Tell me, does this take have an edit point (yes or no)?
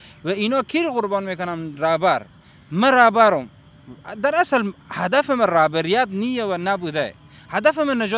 no